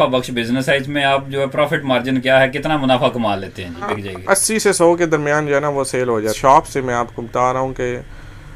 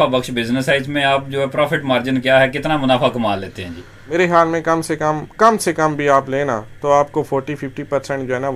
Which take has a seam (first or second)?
first